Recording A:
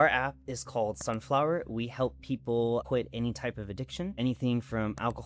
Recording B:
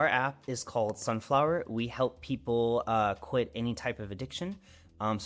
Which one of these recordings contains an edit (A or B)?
A